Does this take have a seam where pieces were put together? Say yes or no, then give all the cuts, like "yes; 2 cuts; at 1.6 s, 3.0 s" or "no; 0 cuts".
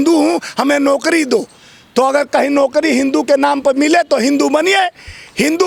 no; 0 cuts